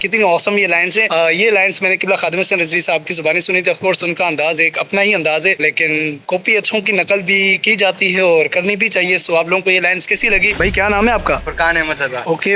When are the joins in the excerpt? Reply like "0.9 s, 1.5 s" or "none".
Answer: 1.1 s, 10.5 s